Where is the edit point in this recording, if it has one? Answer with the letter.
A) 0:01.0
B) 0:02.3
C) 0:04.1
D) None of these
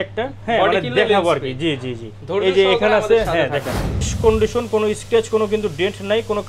C